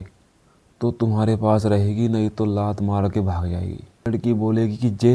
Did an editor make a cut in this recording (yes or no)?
yes